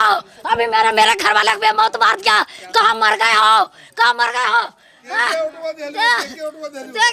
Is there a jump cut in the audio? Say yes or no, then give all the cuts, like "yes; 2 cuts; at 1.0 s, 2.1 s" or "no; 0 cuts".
no; 0 cuts